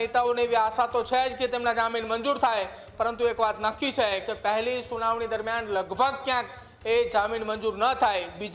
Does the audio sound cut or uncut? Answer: uncut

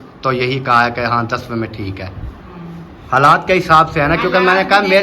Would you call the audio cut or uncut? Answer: uncut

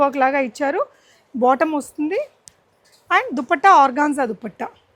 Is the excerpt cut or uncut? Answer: uncut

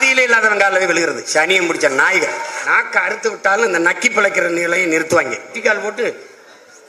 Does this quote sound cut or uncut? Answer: cut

